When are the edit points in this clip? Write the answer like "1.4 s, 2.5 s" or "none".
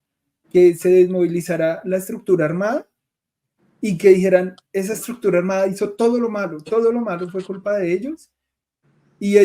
none